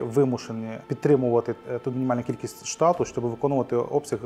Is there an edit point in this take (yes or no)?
no